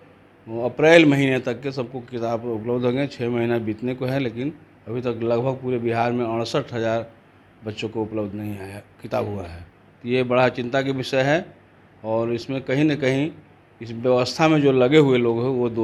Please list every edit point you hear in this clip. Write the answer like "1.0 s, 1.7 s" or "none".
none